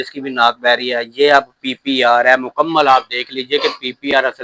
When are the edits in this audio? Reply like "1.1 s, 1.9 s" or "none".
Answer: none